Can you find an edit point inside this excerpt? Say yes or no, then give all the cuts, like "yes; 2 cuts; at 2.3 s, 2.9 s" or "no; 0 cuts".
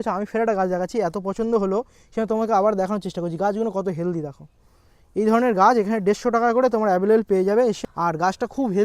yes; 1 cut; at 7.8 s